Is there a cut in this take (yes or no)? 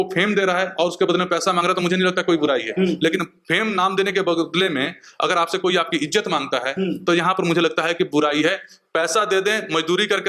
no